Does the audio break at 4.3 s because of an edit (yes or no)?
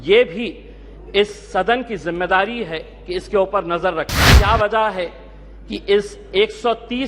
yes